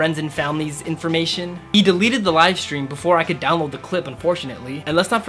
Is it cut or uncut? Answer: uncut